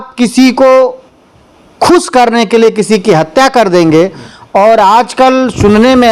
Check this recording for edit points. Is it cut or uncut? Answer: uncut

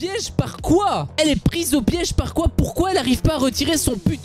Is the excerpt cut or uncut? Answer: uncut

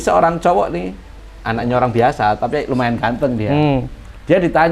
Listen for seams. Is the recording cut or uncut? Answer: uncut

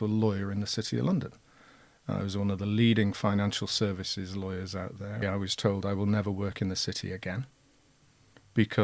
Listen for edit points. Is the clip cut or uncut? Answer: cut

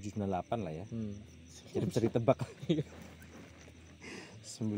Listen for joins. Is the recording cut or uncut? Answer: uncut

